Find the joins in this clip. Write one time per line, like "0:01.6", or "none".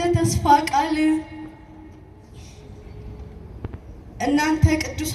none